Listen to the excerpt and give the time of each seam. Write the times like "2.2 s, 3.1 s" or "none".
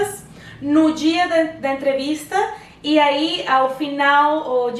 none